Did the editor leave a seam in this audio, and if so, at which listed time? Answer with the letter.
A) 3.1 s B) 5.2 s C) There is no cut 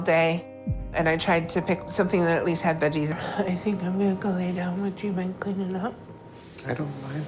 C